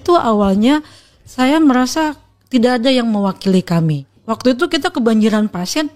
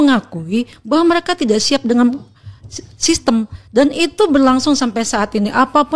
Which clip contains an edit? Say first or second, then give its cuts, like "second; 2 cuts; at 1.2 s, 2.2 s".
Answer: first; 1 cut; at 4.1 s